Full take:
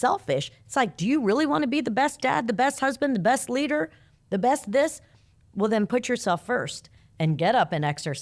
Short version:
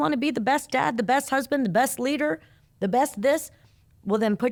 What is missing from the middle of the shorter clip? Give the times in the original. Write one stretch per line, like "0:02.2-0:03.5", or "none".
none